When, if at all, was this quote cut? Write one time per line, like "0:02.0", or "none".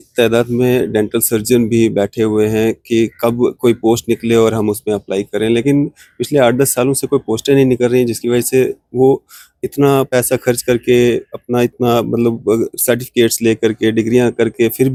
none